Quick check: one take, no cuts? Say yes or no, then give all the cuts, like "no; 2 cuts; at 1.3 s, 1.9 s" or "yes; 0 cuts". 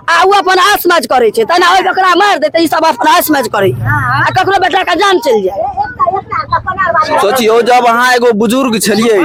yes; 0 cuts